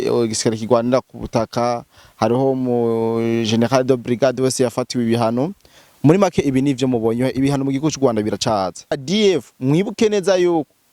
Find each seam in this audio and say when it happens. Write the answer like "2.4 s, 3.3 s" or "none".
9.0 s

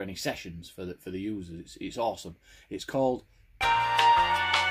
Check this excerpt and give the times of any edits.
3.5 s

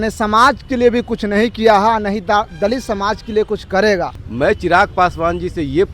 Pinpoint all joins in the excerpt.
4.2 s

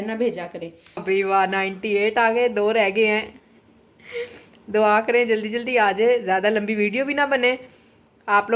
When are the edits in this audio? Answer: 1.0 s

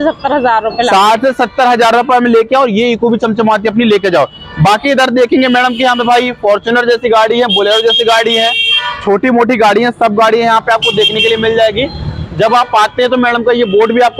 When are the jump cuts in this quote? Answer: none

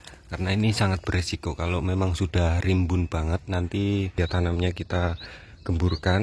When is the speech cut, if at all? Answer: 4.1 s

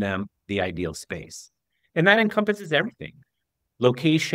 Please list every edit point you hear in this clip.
none

